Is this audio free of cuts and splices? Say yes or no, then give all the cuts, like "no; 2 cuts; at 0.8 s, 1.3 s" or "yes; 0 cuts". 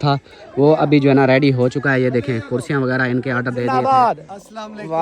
no; 1 cut; at 3.7 s